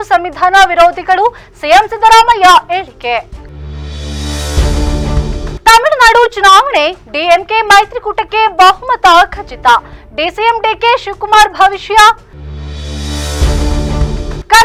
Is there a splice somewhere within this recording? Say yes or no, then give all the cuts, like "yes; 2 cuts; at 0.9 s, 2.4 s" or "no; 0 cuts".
no; 0 cuts